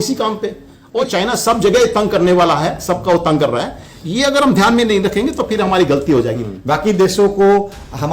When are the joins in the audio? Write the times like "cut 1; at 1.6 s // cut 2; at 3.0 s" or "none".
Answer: cut 1; at 1.0 s // cut 2; at 6.5 s